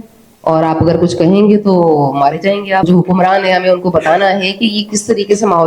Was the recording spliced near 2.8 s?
yes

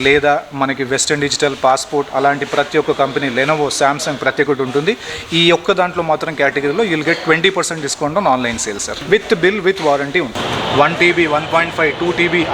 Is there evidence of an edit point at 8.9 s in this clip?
yes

